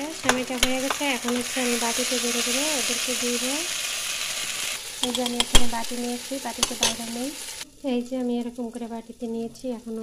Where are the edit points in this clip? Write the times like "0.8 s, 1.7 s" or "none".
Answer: none